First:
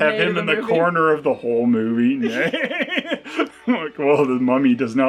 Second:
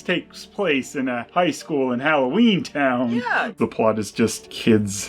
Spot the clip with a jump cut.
second; 2 cuts; at 1.2 s, 3.5 s

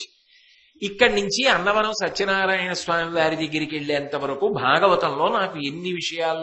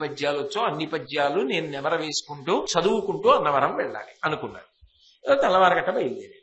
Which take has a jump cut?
second; 1 cut; at 2.7 s

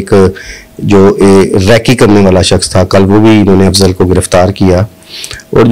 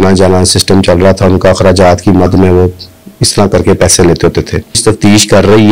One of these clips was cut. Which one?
second; 1 cut; at 4.8 s

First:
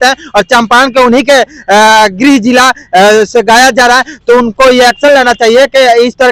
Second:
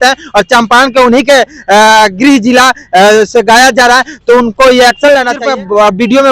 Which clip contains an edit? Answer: second; 1 cut; at 5.4 s

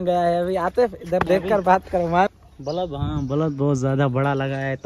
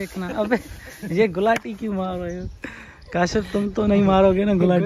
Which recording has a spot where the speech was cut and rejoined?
first; 1 cut; at 2.3 s

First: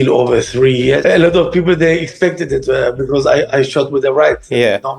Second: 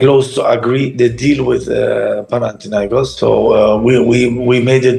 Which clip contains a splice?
first; 1 cut; at 1.0 s

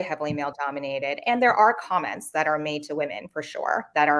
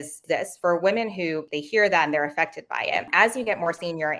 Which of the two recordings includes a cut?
second; 2 cuts; at 1.5 s, 3.1 s

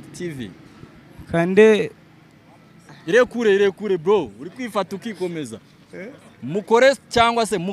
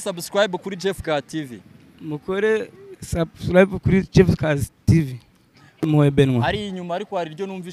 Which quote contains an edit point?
second; 1 cut; at 5.8 s

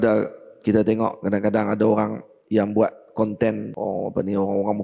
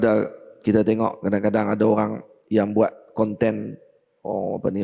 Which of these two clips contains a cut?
first; 1 cut; at 3.7 s

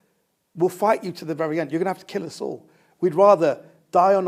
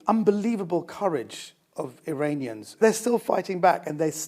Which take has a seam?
second; 1 cut; at 2.8 s

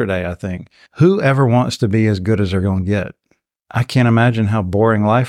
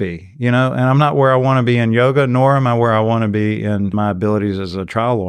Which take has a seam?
second; 1 cut; at 3.9 s

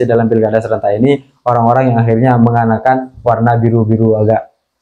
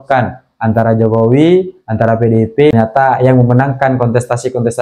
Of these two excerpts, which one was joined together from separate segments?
second; 1 cut; at 2.7 s

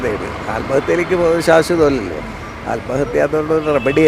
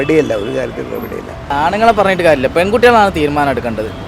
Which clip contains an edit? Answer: second; 1 cut; at 1.4 s

